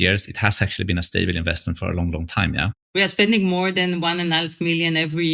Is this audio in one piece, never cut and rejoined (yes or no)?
no